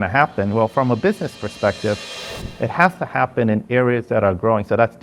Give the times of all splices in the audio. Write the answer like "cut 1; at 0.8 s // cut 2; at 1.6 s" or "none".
none